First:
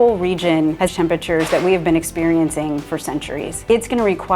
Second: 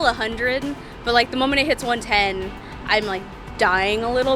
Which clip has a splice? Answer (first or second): first